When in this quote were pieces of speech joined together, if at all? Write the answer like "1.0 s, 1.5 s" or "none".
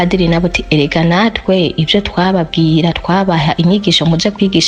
none